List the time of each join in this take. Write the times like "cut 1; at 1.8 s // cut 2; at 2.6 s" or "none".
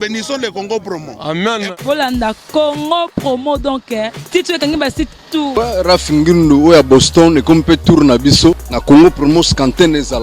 cut 1; at 5.5 s // cut 2; at 8.7 s